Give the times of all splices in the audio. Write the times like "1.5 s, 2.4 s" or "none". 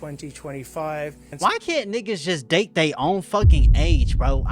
1.3 s

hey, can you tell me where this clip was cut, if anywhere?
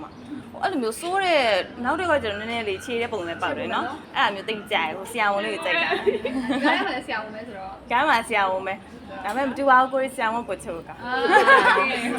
none

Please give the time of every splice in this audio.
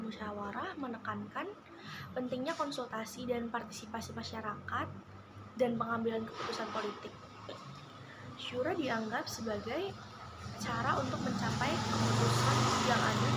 none

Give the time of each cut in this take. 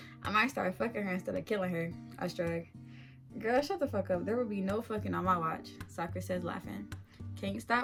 none

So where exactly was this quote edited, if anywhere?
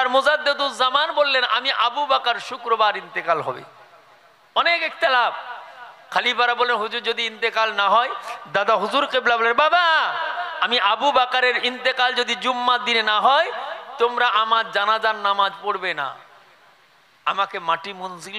none

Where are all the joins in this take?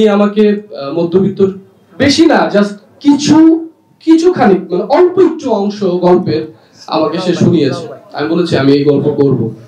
none

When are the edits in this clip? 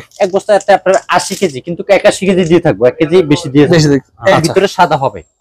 4.3 s

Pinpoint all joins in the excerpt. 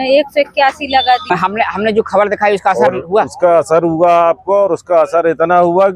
1.3 s

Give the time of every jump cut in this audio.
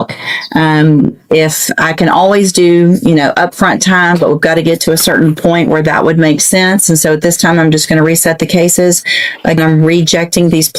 none

